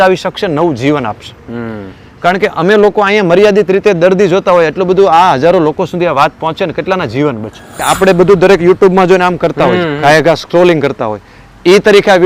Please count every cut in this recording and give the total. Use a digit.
1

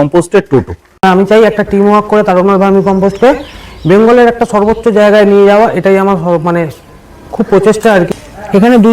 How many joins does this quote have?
2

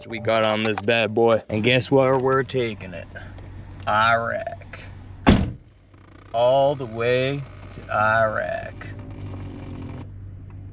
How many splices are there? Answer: 1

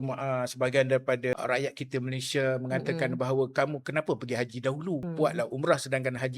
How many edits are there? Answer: 2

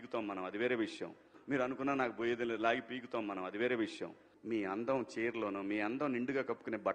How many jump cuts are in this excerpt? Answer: 0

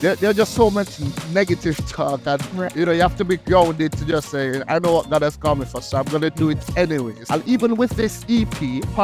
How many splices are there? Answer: 1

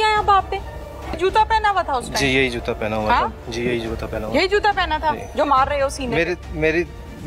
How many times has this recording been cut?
1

